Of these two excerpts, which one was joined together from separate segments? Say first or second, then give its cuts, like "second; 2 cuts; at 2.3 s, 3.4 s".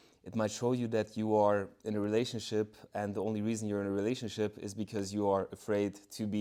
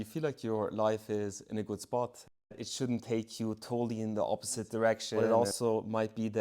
second; 2 cuts; at 2.5 s, 5.1 s